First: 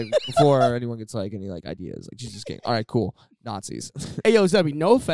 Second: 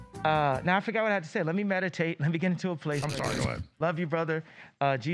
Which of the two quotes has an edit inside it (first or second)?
first